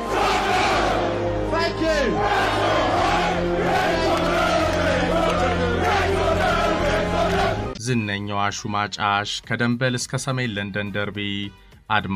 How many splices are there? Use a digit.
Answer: 1